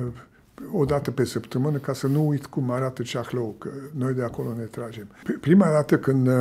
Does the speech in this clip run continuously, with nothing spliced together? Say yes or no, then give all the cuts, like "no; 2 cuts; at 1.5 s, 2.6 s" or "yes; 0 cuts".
no; 1 cut; at 5.2 s